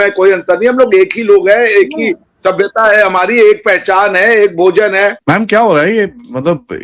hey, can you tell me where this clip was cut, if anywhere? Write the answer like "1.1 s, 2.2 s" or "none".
5.2 s

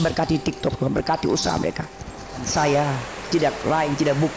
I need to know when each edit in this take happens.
2.5 s

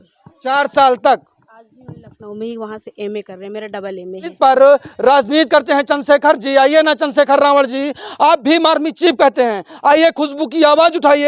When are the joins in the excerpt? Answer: 4.3 s

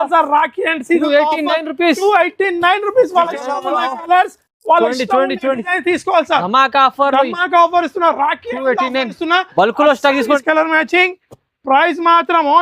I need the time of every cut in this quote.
10.4 s

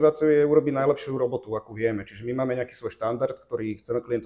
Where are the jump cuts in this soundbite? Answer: none

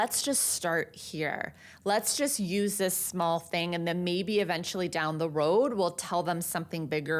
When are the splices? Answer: none

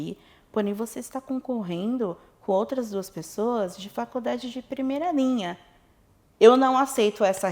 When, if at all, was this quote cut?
6.2 s

